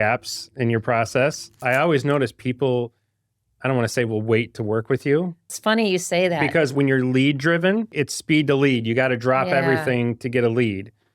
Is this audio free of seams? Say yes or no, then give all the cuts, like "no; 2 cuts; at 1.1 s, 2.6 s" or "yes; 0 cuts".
no; 2 cuts; at 1.6 s, 5.5 s